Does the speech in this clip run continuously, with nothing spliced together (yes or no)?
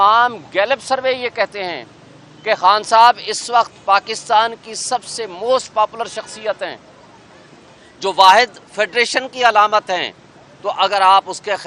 yes